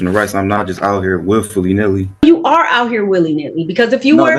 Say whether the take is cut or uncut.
cut